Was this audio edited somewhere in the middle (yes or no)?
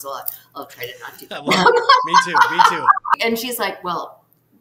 yes